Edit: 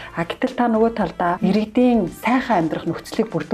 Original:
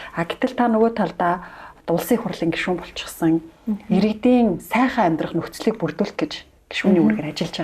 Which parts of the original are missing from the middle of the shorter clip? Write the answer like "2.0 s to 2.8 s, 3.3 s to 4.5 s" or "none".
1.4 s to 3.9 s